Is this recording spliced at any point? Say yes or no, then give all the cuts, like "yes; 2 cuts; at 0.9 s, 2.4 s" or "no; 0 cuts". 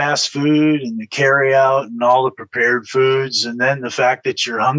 no; 0 cuts